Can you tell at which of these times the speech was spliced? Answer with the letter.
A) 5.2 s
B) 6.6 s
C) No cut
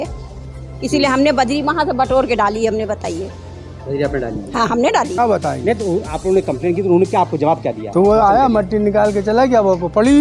A